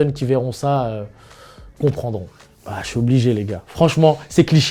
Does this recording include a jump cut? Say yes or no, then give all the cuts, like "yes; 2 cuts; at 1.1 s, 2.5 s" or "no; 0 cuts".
no; 0 cuts